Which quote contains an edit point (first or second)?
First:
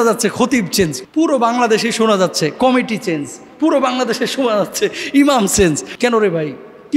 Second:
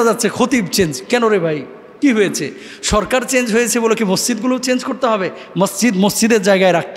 first